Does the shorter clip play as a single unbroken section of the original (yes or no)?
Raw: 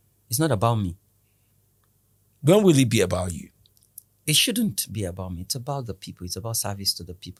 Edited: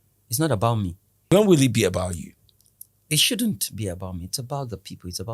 no